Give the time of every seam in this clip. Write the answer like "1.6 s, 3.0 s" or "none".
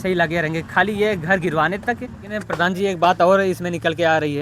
2.2 s